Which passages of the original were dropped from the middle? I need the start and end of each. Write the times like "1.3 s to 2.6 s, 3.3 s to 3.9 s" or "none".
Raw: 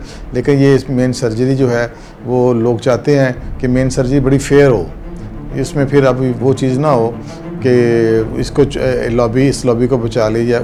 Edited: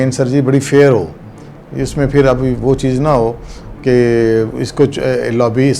none